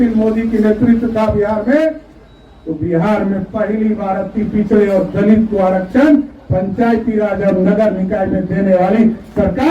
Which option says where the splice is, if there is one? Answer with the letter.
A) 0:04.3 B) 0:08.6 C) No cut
C